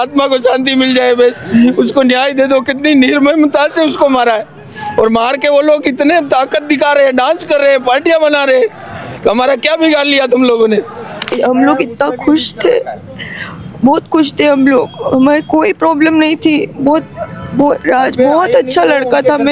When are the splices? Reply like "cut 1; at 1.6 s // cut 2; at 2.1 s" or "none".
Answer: cut 1; at 11.3 s